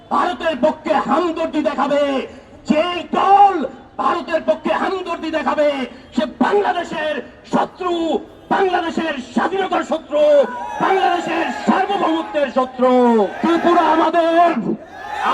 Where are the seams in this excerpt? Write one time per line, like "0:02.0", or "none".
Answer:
0:13.4